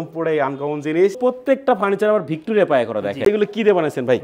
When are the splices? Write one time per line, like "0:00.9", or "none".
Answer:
0:01.2
0:03.3